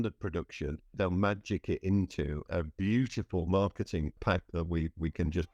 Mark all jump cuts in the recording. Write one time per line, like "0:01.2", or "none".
0:00.9
0:02.4
0:04.2

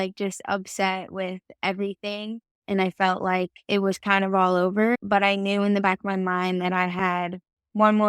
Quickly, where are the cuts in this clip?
0:03.6
0:05.0

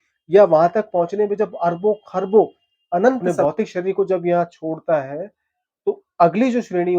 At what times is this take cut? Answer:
0:03.3

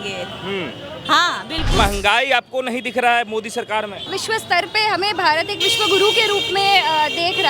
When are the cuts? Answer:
0:01.8
0:04.1

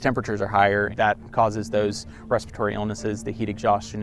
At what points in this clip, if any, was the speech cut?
0:00.9

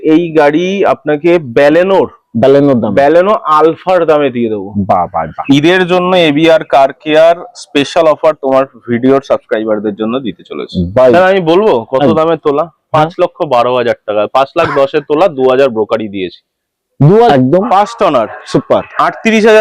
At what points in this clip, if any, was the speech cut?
0:05.4
0:11.1
0:17.3

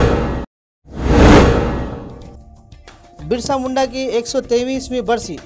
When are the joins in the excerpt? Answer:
0:01.7
0:02.5

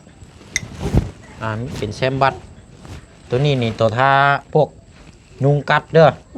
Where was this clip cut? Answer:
none

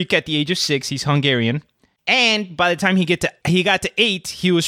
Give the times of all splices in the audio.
0:03.4

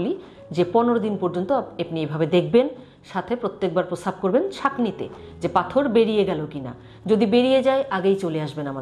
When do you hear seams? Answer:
none

